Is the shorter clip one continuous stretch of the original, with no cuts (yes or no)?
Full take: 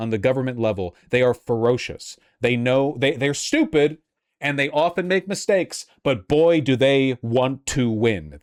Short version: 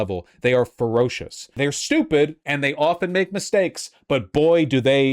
no